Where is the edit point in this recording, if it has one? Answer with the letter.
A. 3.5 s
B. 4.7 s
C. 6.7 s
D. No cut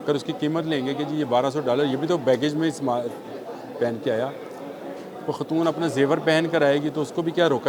D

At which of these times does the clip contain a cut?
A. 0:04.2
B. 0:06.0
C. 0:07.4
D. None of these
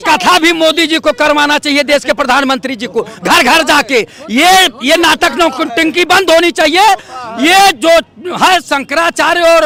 D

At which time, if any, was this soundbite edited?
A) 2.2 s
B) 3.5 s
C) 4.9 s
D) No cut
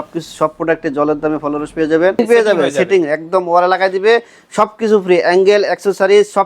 A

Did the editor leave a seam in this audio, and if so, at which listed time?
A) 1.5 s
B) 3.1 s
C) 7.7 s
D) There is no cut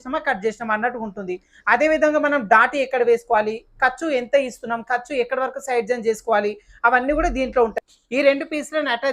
C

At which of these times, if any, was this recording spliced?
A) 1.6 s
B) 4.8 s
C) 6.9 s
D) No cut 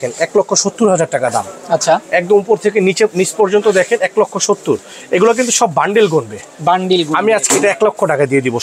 D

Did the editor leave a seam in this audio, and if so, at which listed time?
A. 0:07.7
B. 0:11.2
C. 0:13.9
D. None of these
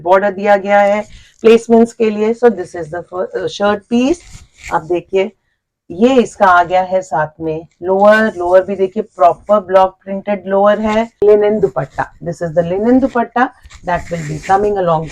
B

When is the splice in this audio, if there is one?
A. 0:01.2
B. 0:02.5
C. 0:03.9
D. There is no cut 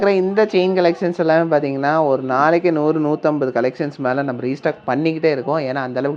D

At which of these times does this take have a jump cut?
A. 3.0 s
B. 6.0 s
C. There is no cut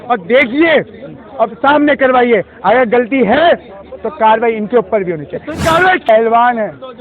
B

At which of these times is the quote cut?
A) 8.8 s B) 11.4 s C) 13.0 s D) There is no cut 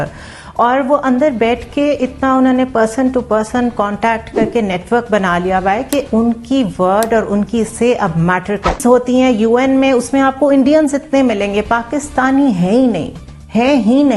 A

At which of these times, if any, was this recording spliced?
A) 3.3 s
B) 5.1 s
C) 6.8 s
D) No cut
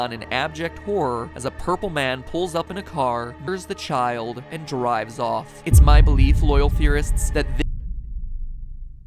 A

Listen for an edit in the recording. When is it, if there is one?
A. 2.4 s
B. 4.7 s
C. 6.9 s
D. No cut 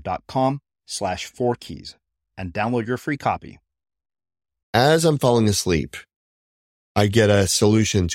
B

